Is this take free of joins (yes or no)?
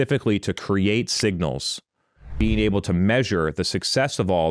no